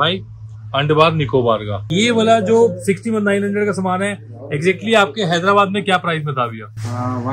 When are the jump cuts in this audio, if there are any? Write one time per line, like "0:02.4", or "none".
0:01.9